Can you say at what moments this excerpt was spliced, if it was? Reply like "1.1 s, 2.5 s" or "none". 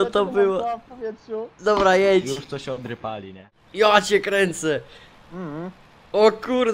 3.5 s